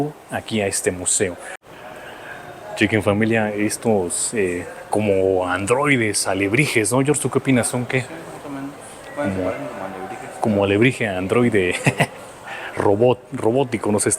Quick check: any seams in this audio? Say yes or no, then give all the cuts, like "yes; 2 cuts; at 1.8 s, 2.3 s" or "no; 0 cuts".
yes; 1 cut; at 1.5 s